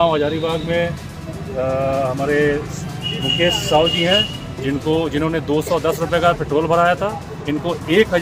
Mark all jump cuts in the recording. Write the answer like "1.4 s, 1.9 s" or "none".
none